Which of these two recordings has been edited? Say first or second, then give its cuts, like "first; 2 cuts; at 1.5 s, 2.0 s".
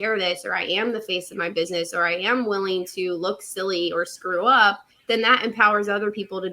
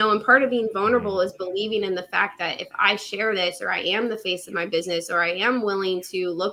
first; 1 cut; at 4.9 s